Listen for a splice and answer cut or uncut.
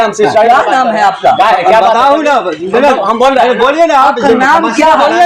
uncut